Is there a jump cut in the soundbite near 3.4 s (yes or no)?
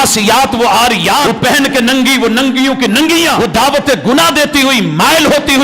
yes